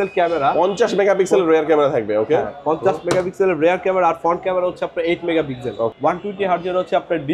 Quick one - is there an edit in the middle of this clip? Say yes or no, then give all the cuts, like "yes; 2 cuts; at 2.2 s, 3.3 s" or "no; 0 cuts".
yes; 1 cut; at 5.9 s